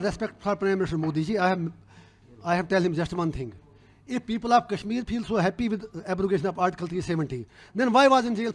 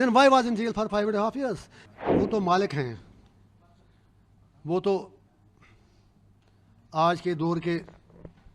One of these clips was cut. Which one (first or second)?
second